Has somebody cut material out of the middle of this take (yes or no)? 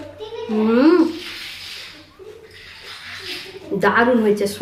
no